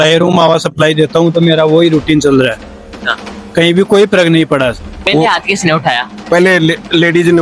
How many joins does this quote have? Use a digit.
1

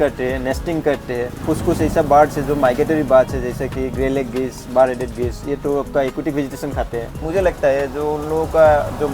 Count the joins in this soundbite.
2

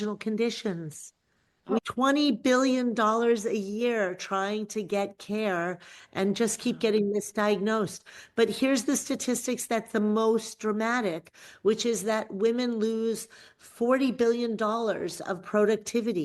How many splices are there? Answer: 1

